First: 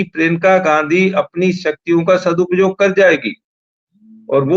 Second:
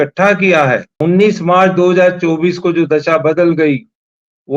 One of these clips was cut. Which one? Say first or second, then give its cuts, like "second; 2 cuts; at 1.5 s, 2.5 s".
second; 1 cut; at 1.0 s